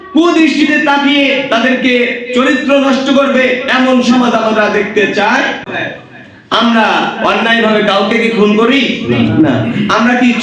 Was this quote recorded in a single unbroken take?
no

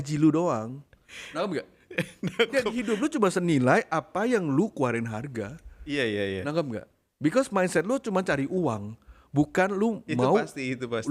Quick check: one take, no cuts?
yes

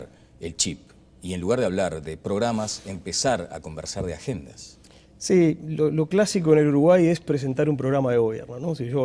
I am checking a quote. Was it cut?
yes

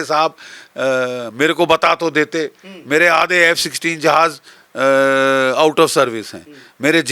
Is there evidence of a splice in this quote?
no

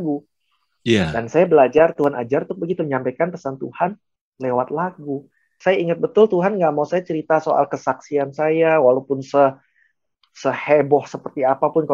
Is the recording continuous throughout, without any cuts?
no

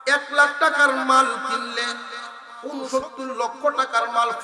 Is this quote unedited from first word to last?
no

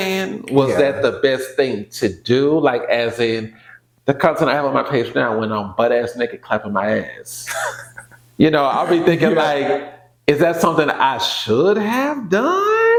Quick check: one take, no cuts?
yes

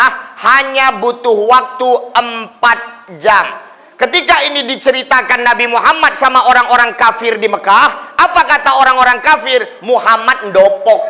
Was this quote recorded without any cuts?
yes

